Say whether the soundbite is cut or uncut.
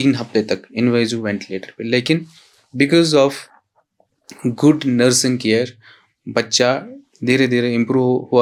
uncut